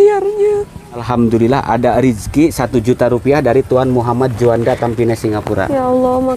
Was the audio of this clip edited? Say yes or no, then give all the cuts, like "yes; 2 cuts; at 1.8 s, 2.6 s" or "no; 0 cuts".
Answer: yes; 1 cut; at 1.0 s